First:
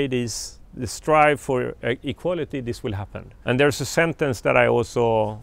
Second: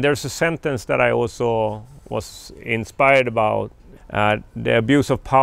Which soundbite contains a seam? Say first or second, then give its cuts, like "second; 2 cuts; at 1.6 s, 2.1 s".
second; 1 cut; at 3.7 s